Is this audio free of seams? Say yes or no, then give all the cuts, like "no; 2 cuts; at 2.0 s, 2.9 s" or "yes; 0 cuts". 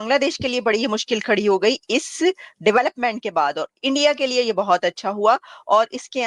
yes; 0 cuts